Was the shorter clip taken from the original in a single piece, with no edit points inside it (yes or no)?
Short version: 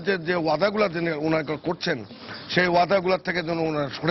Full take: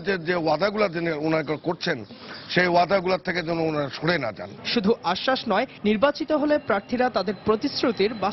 yes